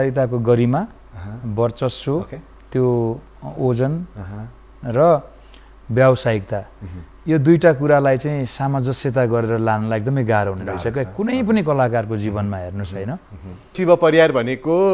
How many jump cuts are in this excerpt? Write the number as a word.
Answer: one